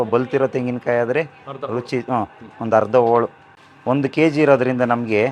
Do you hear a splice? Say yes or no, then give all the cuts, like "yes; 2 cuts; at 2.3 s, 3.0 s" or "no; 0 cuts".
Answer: no; 0 cuts